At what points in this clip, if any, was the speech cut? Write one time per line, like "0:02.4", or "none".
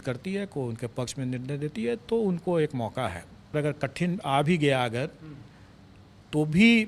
0:03.5